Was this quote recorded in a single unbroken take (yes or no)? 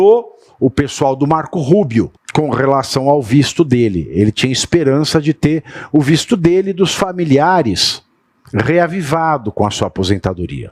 no